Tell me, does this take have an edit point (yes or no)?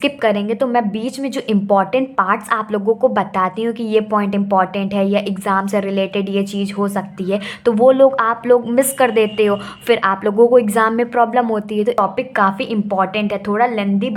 yes